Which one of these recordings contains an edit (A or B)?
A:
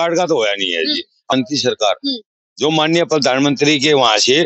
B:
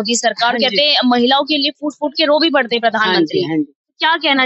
A